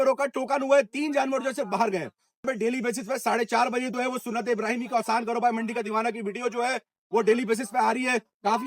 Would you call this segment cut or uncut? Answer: cut